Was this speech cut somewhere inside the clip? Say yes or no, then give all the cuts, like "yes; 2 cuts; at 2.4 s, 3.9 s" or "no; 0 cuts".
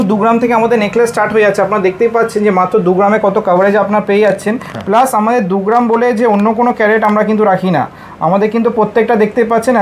no; 0 cuts